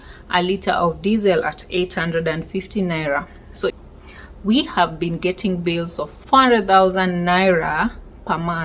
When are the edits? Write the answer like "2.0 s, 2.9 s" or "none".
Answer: 3.7 s, 6.1 s